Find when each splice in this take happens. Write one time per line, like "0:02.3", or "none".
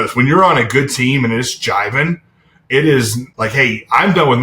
0:03.2